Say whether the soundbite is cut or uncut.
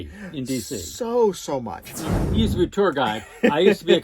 cut